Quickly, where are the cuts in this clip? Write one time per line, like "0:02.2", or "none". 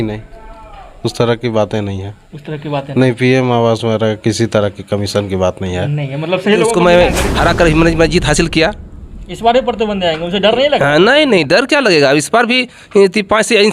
0:06.7